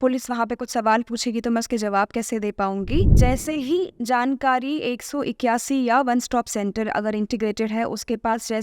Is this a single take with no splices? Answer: no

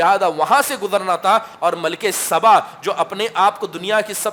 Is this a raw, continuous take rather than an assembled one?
yes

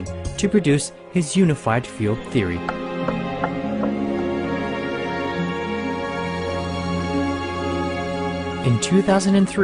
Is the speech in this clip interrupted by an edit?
yes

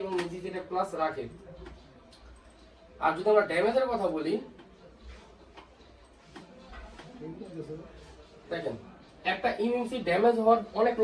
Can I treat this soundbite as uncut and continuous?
yes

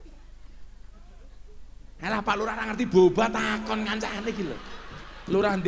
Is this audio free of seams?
yes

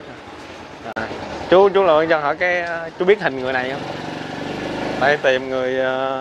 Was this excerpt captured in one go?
no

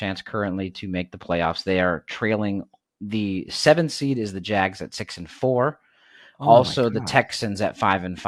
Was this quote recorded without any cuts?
yes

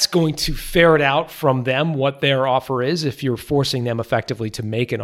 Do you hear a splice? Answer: no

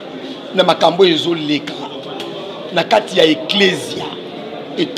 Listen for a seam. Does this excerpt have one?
no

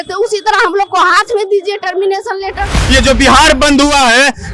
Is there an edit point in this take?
yes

